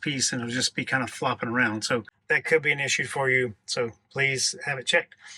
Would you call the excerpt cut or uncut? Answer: cut